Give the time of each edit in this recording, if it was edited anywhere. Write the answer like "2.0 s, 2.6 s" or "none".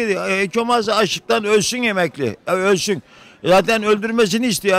none

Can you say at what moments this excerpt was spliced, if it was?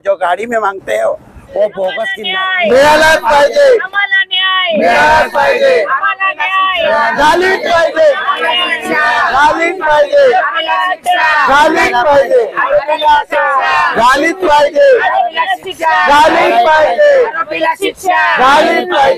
2.1 s

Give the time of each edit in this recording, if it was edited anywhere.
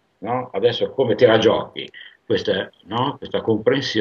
none

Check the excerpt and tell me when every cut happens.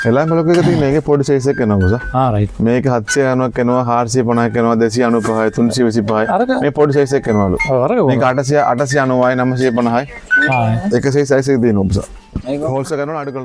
none

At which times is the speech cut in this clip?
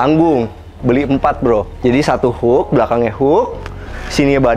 1.7 s

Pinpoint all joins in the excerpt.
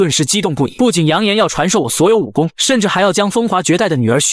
2.6 s

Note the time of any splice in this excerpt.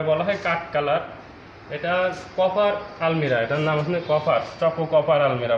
none

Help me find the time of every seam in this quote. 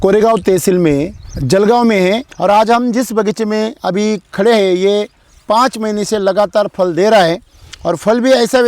2.2 s

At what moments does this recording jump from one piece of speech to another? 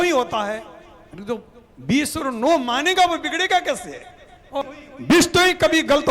4.5 s

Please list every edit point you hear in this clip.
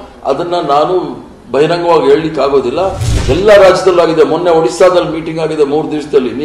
3.1 s

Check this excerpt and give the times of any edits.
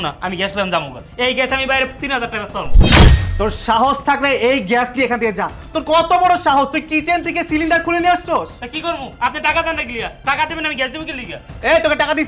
2.7 s, 3.3 s

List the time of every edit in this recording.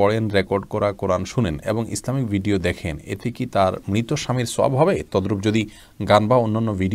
none

